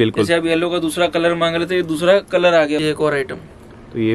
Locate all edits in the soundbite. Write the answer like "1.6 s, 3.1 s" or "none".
2.8 s